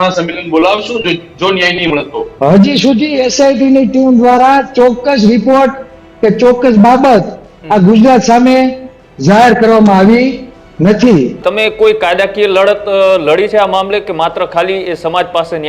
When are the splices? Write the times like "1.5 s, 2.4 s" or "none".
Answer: 2.2 s, 11.4 s